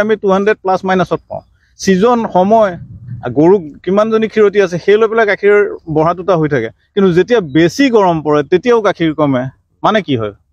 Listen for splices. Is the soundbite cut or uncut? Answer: uncut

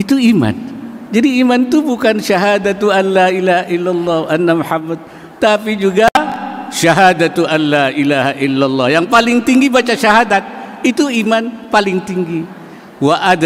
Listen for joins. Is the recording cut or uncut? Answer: cut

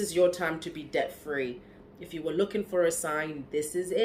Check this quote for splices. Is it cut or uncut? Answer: uncut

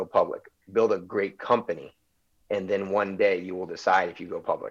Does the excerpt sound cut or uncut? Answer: uncut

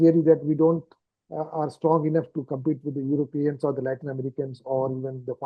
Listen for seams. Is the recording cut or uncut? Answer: uncut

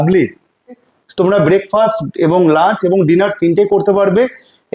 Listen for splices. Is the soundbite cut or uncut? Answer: cut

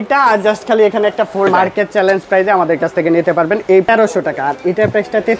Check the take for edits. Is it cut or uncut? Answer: cut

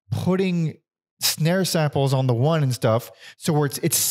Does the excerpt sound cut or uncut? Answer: uncut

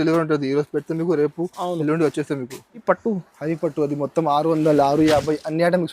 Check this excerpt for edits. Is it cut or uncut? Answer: cut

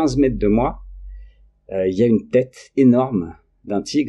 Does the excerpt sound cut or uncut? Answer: uncut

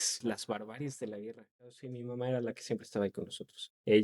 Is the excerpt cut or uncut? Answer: cut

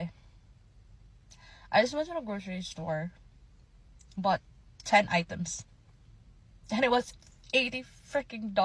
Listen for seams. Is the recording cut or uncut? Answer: uncut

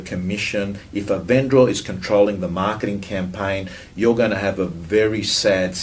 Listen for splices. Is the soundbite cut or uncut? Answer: uncut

